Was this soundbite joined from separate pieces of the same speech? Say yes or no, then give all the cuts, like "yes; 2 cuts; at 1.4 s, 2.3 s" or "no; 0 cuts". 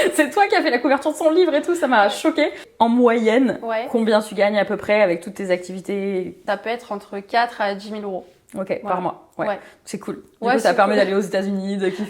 yes; 2 cuts; at 2.6 s, 6.4 s